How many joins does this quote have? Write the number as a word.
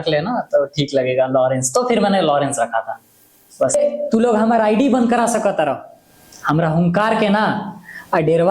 one